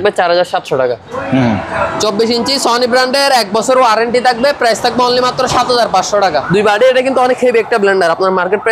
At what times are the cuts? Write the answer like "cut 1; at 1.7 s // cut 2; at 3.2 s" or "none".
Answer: cut 1; at 1.1 s // cut 2; at 6.5 s